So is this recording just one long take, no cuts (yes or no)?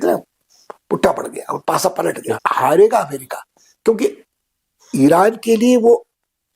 no